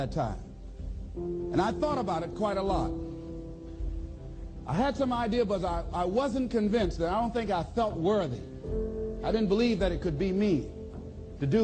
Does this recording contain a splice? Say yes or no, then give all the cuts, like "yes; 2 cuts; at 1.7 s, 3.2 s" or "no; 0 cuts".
no; 0 cuts